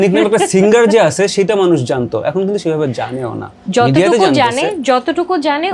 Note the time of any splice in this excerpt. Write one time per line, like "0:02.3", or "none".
none